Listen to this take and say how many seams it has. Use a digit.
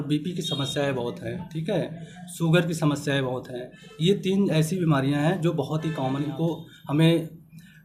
1